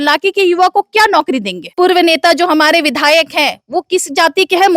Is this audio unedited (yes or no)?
no